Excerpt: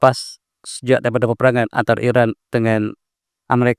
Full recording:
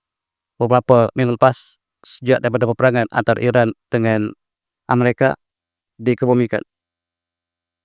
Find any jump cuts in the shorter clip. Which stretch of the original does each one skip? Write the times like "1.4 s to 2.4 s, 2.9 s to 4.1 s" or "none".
none